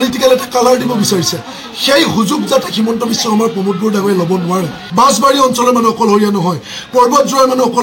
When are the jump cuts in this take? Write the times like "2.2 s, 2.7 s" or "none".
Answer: 4.8 s